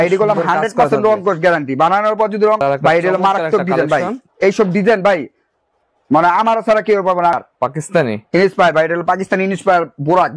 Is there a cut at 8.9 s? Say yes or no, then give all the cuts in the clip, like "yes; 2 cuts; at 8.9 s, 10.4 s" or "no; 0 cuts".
no; 2 cuts; at 2.6 s, 7.4 s